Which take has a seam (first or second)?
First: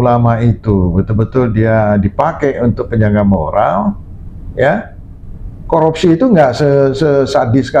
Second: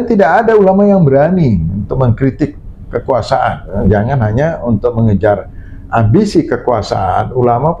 second